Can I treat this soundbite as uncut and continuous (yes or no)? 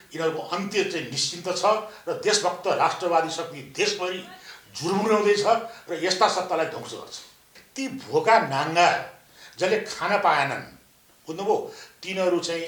no